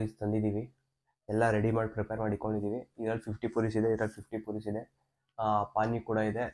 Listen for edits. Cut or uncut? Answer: uncut